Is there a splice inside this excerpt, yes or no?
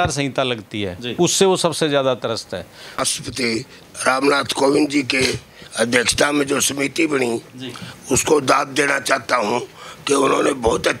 yes